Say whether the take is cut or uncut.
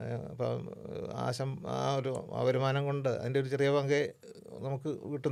uncut